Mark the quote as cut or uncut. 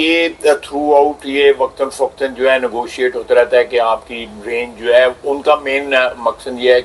uncut